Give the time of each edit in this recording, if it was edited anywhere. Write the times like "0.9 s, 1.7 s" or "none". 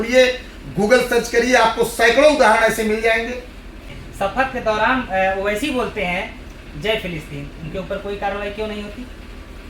3.9 s